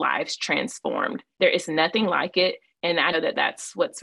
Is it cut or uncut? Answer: cut